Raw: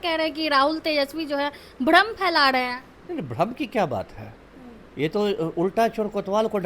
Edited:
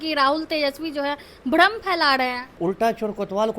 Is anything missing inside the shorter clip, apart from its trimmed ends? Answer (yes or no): yes